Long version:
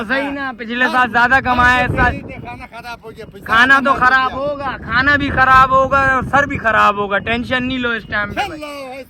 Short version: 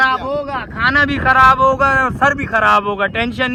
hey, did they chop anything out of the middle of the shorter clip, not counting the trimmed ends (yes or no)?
no